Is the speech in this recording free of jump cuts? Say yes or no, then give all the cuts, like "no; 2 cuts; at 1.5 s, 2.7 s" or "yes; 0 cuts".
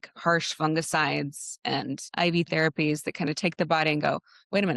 no; 1 cut; at 2.0 s